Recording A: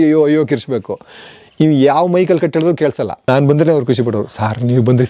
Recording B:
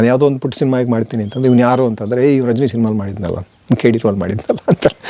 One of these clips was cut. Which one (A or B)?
A